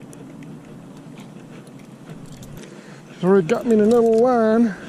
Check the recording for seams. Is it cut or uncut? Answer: cut